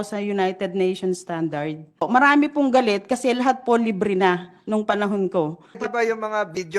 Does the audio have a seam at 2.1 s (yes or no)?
yes